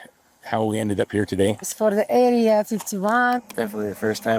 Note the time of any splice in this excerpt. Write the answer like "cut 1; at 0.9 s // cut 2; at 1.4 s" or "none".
cut 1; at 1.7 s // cut 2; at 3.4 s